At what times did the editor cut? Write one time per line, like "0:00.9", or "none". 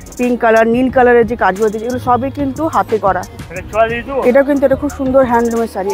none